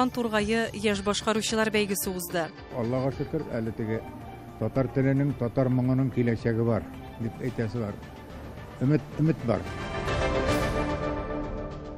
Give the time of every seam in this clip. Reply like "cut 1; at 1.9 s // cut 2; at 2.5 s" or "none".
cut 1; at 9.8 s